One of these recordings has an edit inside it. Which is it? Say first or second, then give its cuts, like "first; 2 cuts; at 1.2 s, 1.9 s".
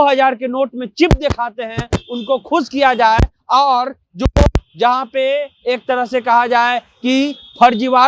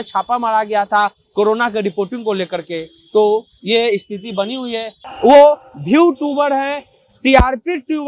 second; 1 cut; at 5.0 s